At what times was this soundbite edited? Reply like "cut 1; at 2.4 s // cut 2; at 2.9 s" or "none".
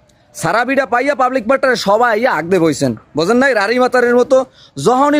none